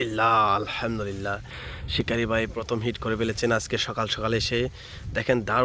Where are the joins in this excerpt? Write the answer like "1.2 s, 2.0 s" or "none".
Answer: none